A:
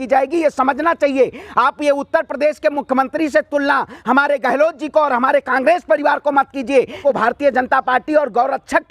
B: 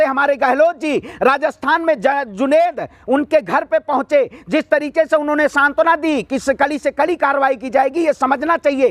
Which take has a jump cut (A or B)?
A